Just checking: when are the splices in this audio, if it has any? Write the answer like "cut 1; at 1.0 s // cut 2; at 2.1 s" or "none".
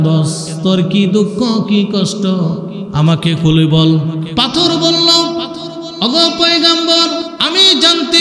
cut 1; at 4.3 s // cut 2; at 5.8 s // cut 3; at 7.3 s